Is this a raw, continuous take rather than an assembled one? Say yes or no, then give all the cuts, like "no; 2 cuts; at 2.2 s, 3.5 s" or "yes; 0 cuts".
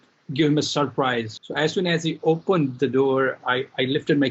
no; 1 cut; at 1.4 s